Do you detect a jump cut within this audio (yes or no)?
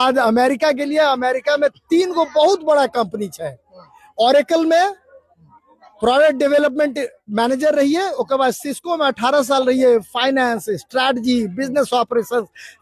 no